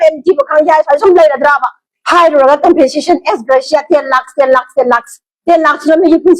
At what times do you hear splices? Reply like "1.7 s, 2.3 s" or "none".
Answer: none

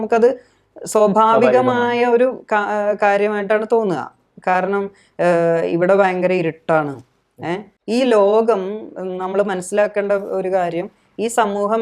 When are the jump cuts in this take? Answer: 7.7 s

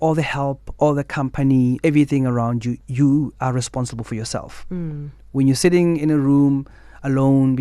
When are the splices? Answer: 1.8 s, 2.8 s

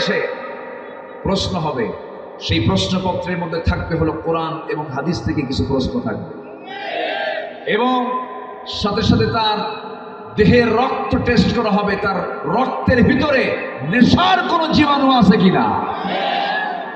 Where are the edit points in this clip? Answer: none

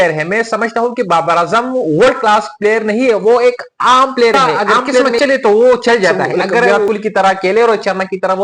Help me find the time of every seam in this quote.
5.1 s, 6.8 s

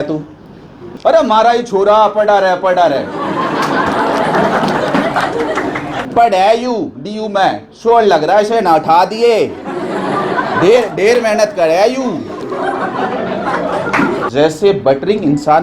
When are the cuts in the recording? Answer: 0.9 s, 6.0 s, 14.3 s

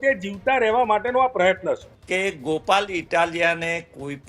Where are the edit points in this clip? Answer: 1.9 s

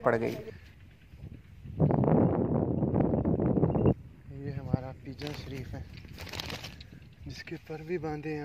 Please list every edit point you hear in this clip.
3.9 s

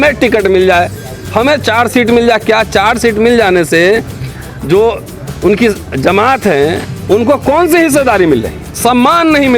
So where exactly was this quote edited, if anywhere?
8.7 s

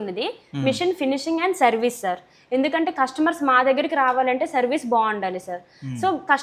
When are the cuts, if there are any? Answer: none

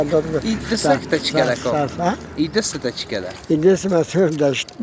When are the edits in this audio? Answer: none

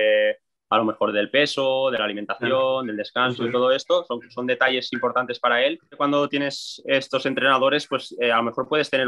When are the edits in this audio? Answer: 5.9 s

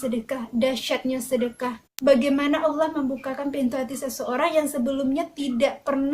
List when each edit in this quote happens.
1.8 s

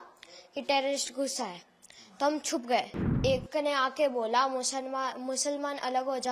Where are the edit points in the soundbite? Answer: 3.2 s

